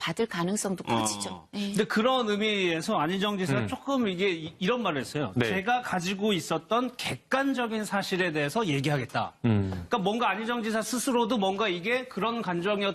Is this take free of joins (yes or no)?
no